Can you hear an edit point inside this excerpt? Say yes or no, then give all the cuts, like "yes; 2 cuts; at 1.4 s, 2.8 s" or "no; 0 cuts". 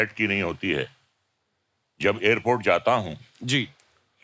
no; 0 cuts